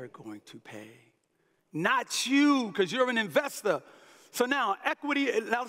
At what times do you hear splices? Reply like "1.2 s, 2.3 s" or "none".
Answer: none